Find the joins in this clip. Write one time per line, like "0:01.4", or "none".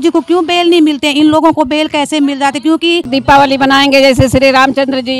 0:03.1